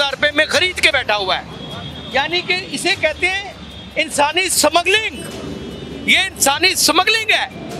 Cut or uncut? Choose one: uncut